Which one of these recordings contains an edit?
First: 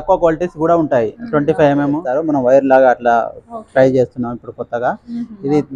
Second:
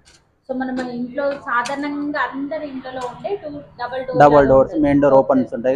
first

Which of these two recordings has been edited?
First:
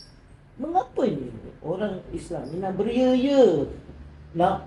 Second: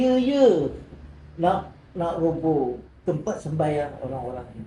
second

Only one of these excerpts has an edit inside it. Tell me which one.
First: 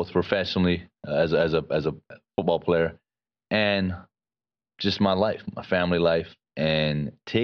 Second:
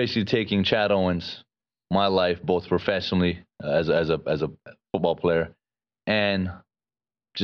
first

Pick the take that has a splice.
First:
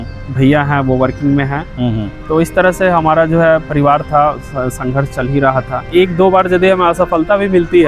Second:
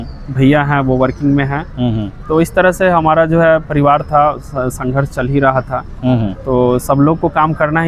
first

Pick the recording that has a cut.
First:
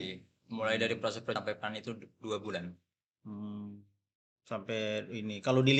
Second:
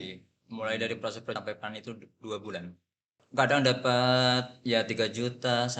second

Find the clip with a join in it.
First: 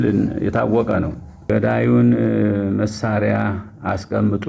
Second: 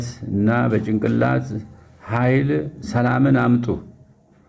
first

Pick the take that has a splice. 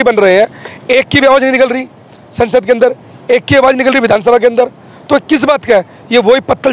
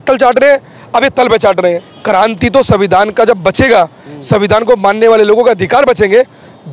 second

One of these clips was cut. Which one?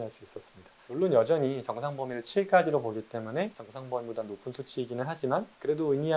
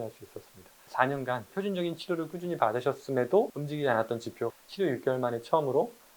second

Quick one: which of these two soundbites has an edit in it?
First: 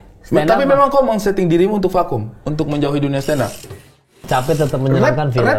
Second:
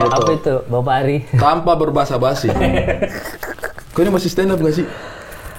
first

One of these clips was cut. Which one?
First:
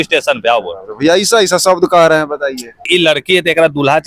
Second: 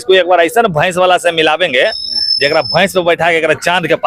first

